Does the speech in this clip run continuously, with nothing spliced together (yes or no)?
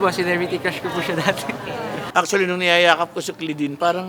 no